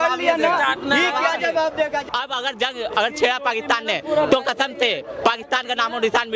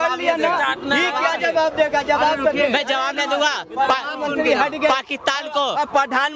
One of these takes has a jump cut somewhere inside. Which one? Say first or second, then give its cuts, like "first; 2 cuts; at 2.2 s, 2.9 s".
first; 1 cut; at 2.0 s